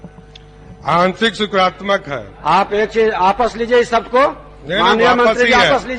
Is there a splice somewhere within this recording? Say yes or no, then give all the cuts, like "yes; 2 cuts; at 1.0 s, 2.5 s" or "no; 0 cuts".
no; 0 cuts